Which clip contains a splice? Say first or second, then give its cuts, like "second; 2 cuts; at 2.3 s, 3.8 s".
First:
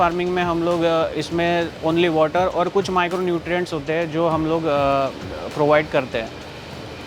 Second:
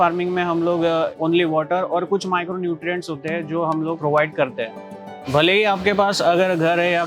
second; 3 cuts; at 1.1 s, 4.0 s, 5.2 s